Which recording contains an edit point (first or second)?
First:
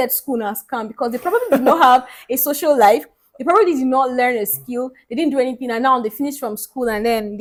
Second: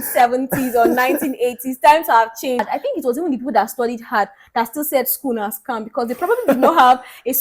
second